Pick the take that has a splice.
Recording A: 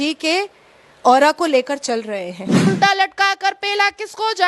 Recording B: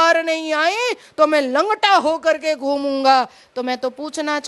A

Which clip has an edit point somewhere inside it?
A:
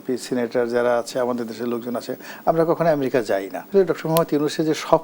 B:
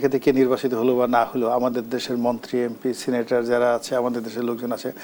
A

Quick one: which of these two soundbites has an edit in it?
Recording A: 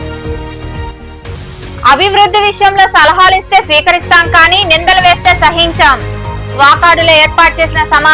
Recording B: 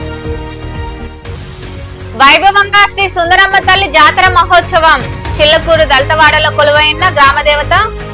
B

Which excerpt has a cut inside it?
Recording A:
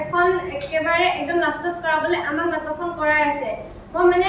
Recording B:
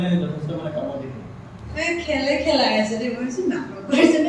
B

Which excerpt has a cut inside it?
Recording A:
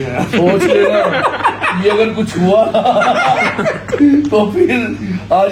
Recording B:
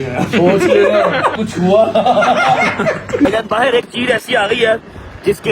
B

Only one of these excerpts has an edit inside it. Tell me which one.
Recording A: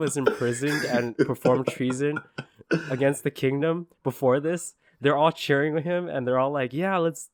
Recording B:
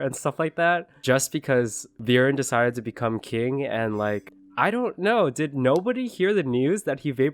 B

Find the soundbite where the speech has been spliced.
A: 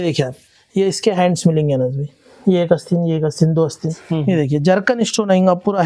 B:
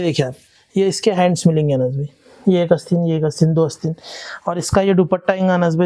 A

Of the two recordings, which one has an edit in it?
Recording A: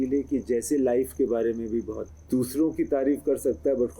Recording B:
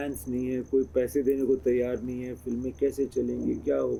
A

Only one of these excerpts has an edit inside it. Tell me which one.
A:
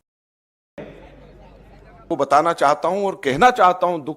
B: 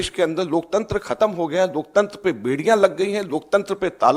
A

